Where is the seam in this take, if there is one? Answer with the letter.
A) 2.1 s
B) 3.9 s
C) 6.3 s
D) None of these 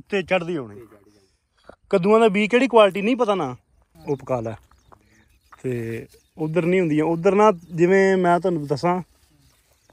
B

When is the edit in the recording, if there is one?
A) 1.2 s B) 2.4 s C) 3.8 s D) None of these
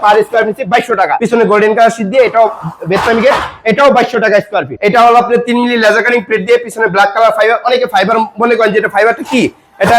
A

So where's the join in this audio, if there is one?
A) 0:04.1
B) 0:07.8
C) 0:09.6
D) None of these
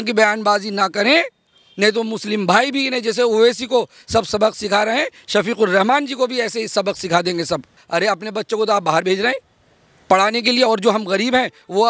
B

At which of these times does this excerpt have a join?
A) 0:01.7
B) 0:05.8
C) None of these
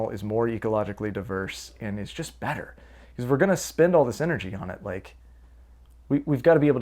C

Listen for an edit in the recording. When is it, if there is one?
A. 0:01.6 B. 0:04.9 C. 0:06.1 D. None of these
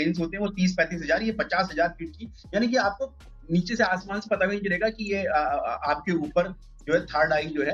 D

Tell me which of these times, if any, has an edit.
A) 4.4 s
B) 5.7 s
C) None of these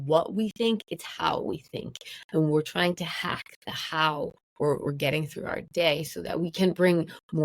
A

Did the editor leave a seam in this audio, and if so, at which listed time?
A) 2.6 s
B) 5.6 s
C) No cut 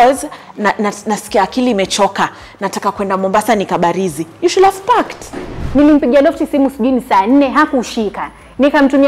B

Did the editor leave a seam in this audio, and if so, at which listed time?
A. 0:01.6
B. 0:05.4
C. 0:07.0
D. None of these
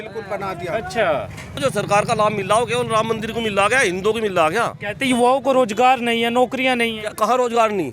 A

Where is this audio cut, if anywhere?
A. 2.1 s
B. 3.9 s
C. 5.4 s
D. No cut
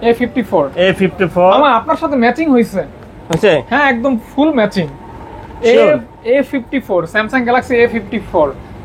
D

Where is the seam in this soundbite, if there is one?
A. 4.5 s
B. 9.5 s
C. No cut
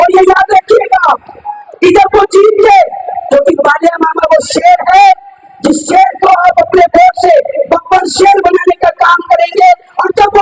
C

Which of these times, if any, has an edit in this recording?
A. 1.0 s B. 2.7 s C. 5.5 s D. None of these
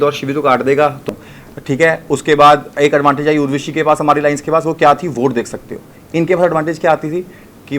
A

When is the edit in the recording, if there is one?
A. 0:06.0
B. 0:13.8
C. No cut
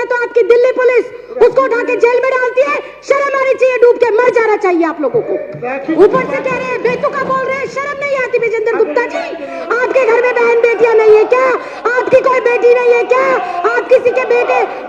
A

